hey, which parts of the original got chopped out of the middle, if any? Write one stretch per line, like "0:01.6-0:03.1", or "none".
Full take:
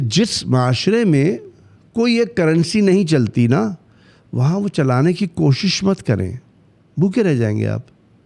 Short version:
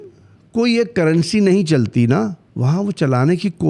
0:03.9-0:04.2